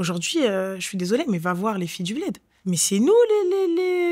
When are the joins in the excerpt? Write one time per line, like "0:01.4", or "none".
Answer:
0:02.5